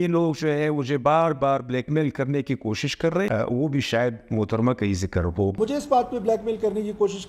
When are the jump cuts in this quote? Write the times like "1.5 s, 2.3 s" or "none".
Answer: 3.3 s